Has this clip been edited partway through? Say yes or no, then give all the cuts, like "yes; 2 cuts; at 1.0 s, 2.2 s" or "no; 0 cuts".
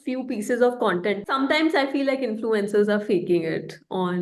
yes; 1 cut; at 1.2 s